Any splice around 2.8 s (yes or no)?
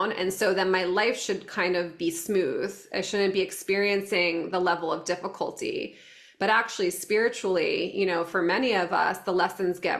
no